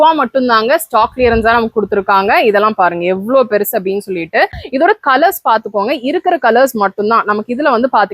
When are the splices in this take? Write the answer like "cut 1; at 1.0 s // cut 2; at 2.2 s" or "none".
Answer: cut 1; at 4.6 s